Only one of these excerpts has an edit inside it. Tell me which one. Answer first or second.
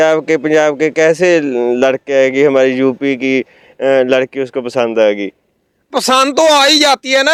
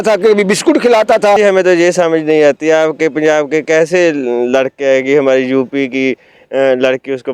second